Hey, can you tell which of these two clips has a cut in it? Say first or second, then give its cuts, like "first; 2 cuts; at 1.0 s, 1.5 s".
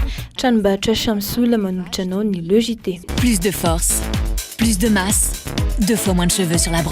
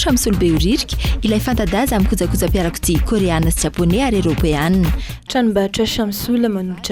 first; 1 cut; at 3.0 s